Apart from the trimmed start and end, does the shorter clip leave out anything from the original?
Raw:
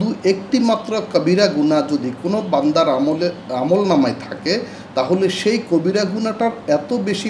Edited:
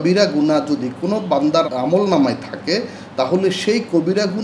yes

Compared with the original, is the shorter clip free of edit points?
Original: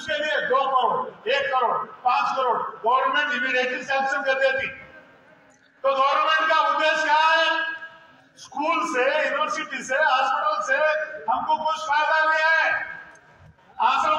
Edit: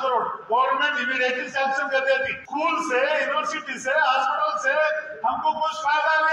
no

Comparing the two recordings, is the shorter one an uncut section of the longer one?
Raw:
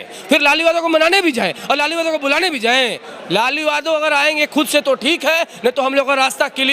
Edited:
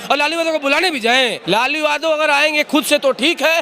no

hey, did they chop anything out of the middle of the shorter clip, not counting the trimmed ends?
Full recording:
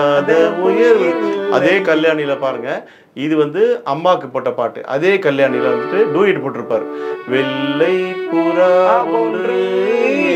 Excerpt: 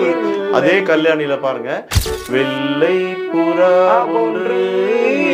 yes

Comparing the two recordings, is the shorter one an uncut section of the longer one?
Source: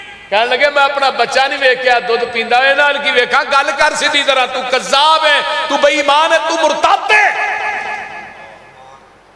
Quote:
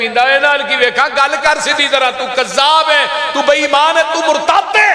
yes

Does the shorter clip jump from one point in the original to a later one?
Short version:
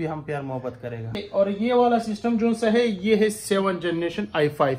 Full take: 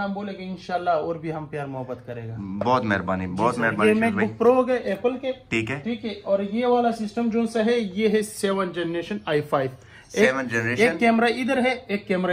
yes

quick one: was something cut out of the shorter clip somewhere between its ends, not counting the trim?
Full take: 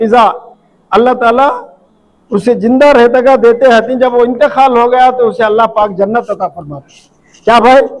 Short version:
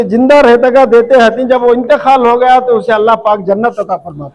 no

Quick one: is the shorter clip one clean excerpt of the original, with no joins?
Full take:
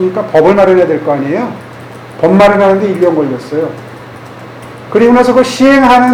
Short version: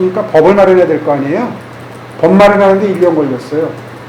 yes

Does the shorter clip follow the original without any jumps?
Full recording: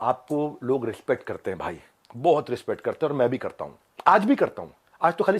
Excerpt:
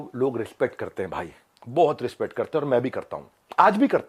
yes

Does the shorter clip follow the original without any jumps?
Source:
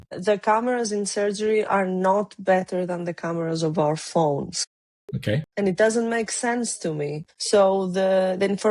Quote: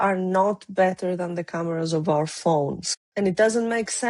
no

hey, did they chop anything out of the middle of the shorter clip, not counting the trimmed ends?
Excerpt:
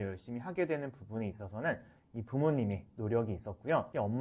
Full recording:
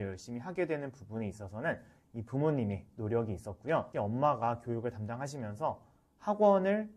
no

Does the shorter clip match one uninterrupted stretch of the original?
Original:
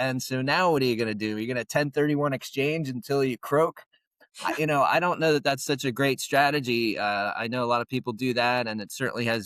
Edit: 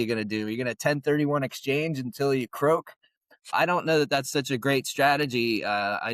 no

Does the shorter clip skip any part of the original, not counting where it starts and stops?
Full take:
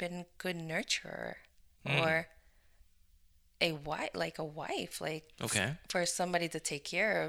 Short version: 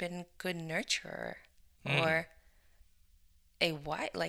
no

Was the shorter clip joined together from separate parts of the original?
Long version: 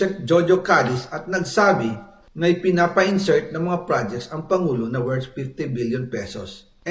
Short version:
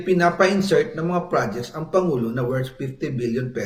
no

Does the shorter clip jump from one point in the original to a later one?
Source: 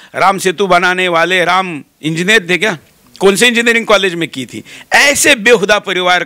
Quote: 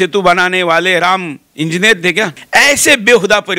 yes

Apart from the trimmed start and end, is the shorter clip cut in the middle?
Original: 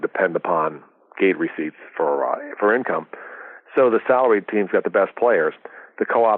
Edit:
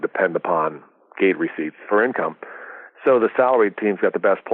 yes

